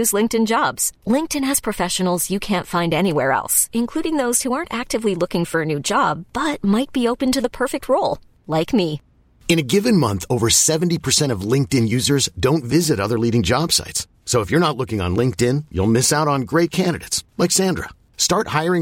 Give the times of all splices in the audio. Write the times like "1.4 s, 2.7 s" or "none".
none

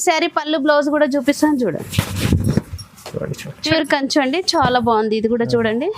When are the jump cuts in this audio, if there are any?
3.6 s

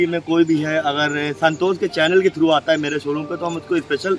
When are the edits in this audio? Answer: none

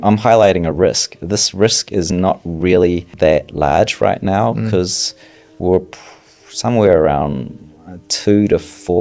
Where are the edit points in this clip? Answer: 3.1 s

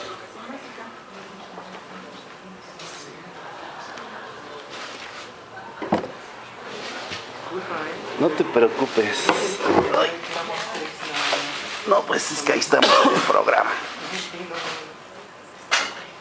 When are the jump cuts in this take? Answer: none

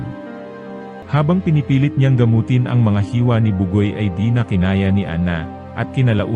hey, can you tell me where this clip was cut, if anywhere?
0.9 s

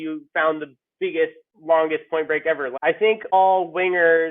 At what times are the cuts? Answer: 2.8 s

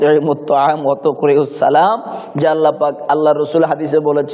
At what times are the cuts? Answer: none

